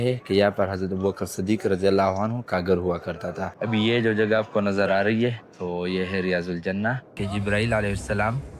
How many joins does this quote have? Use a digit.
2